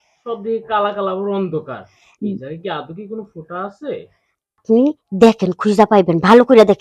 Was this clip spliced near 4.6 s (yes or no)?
yes